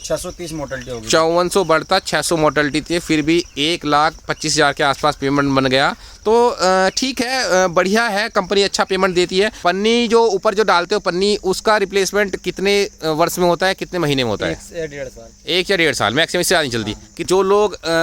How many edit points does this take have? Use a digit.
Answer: 2